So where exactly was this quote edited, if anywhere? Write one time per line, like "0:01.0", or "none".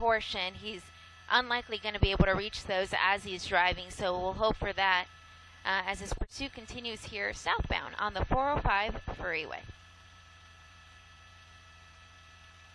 0:07.4